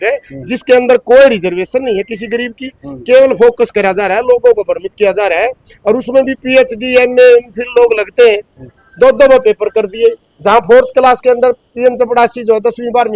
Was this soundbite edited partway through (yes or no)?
no